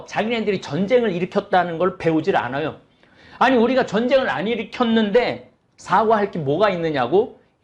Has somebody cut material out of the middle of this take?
no; 0 cuts

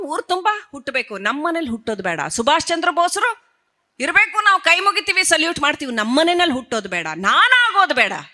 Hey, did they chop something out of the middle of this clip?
no; 0 cuts

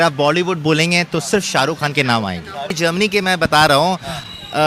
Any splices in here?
yes; 1 cut; at 2.8 s

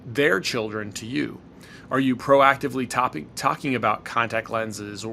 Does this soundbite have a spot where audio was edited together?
no; 0 cuts

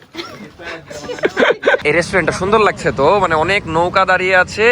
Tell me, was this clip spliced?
yes; 1 cut; at 1.8 s

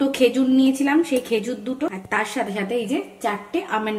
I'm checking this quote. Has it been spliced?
no; 0 cuts

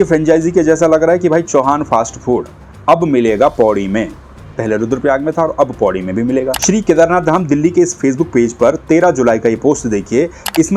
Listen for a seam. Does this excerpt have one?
no; 0 cuts

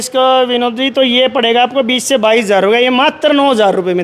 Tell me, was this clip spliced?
no; 0 cuts

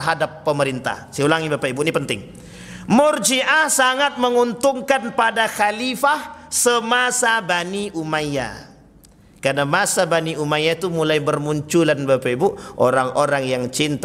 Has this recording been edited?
no; 0 cuts

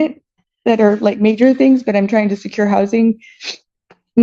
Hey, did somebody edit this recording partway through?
no; 0 cuts

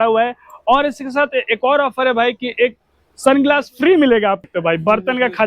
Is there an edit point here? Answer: yes; 1 cut; at 4.4 s

